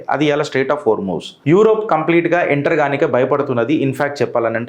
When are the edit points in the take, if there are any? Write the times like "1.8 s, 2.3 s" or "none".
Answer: 1.4 s